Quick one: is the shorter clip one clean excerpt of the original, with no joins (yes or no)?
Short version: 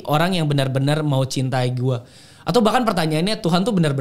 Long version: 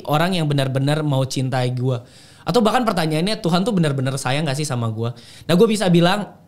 yes